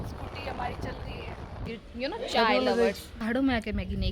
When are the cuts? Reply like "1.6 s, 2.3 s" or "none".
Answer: 1.8 s, 3.2 s